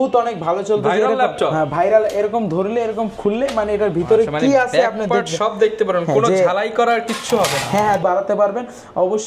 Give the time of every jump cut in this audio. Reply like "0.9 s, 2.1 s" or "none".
8.0 s